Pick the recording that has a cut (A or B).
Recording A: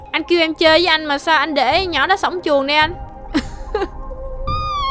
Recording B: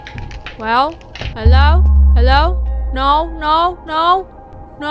A